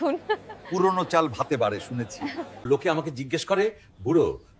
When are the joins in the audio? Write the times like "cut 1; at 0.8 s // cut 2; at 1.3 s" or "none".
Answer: cut 1; at 2.6 s

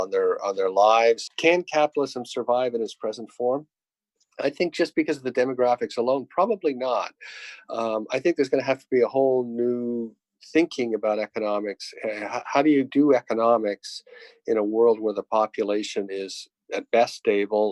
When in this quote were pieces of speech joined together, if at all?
cut 1; at 1.3 s

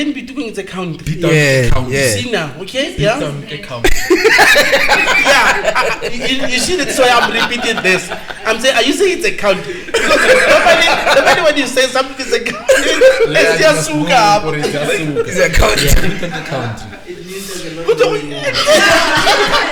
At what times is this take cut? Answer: none

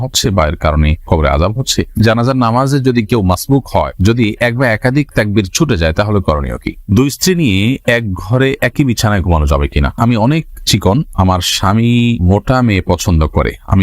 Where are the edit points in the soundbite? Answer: cut 1; at 2.0 s // cut 2; at 6.7 s // cut 3; at 9.9 s

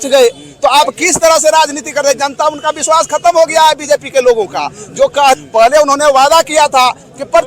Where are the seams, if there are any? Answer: cut 1; at 5.4 s

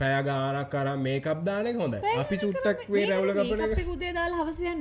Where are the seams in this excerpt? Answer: none

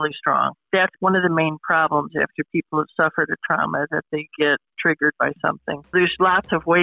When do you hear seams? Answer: cut 1; at 0.9 s // cut 2; at 4.7 s // cut 3; at 5.9 s

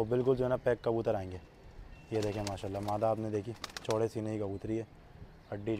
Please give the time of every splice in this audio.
none

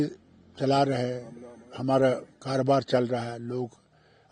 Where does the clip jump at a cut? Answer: none

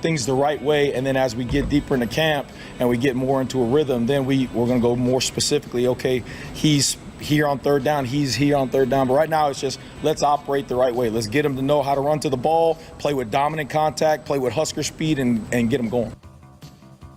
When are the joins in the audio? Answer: cut 1; at 16.2 s

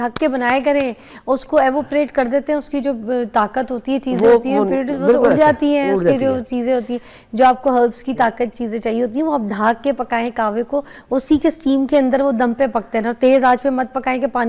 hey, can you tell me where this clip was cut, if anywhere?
none

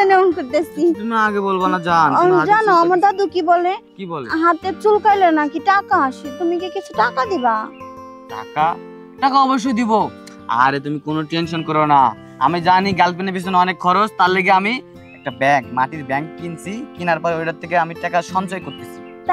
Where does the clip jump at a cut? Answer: none

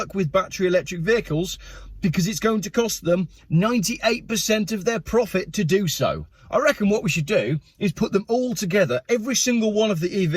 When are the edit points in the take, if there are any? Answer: cut 1; at 6.3 s

